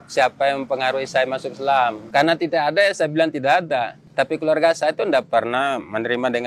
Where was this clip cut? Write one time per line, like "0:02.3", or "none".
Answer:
0:02.0
0:04.0